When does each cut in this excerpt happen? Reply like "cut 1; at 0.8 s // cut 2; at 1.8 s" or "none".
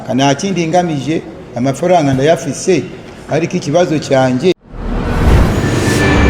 cut 1; at 4.5 s